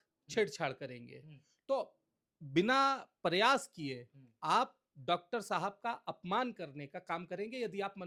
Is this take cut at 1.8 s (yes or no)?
no